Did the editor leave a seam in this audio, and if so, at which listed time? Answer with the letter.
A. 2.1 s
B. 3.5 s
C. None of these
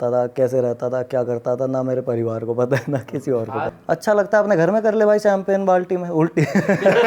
B